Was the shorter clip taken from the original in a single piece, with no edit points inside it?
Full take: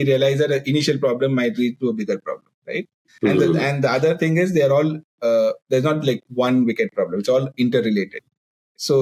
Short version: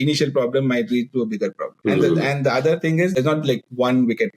no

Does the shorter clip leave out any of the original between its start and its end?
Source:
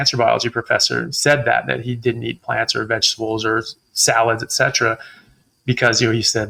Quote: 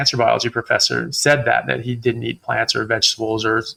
no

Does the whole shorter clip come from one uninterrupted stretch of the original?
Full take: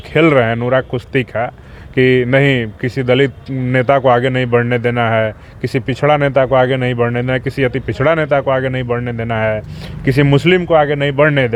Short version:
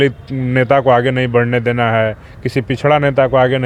yes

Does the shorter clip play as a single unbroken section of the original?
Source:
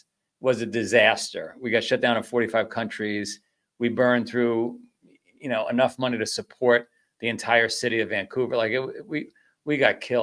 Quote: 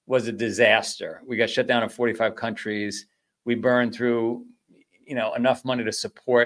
yes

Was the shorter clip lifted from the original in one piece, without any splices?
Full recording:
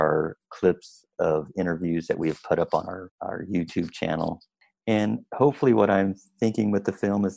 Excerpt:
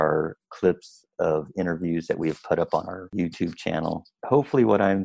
no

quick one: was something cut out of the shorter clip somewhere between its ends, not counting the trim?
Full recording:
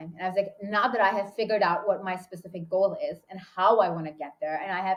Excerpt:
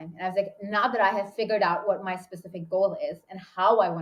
no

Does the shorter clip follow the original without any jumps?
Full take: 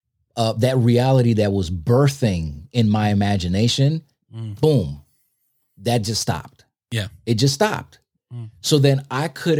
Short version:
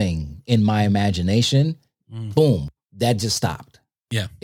no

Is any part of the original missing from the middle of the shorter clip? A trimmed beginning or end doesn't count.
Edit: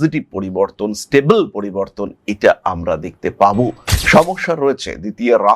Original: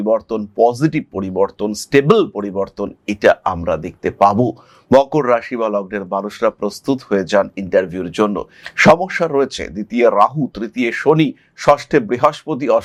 yes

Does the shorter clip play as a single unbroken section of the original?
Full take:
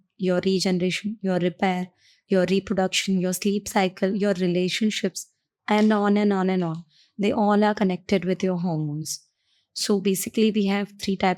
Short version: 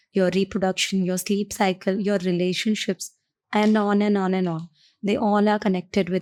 yes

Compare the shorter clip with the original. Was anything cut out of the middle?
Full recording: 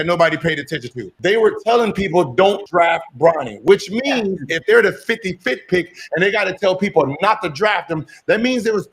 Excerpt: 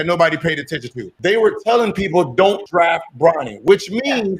no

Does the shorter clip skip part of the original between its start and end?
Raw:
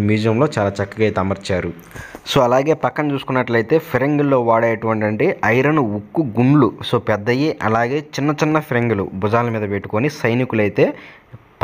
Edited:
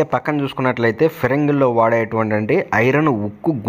no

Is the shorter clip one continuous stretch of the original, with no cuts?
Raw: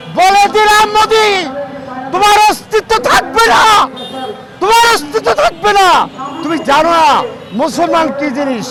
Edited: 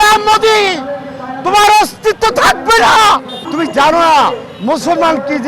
no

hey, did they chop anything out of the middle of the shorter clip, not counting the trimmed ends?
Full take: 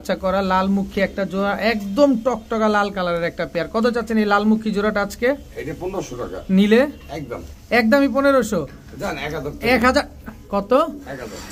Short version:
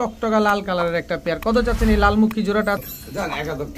yes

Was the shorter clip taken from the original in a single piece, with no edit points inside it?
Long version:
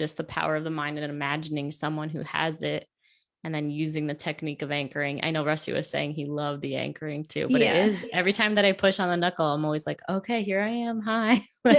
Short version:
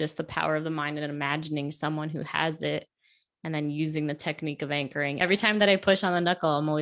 no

